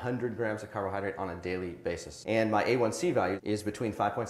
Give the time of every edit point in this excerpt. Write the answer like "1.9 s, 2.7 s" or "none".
3.4 s